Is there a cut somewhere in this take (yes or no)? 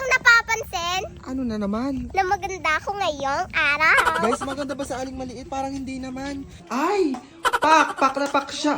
yes